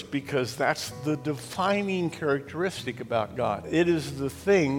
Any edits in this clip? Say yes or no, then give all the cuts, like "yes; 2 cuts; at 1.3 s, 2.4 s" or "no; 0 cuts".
yes; 1 cut; at 3.6 s